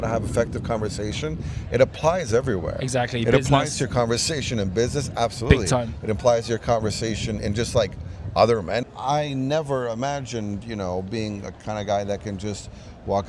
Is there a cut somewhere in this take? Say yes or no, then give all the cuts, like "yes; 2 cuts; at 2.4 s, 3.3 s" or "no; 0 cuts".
yes; 1 cut; at 8.8 s